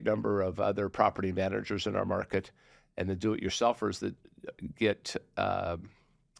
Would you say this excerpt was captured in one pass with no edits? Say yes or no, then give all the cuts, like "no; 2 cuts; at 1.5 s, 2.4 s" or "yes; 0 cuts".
yes; 0 cuts